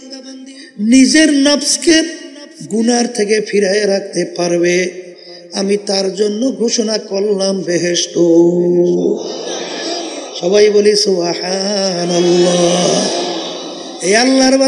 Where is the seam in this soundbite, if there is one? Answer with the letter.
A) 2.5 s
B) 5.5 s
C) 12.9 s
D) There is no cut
D